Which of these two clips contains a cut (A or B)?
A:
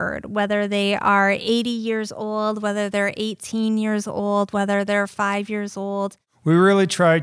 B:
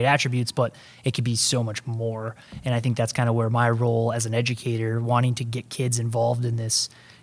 A